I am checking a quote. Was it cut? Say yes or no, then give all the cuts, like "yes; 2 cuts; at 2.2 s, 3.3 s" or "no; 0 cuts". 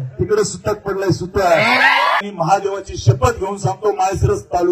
yes; 1 cut; at 2.2 s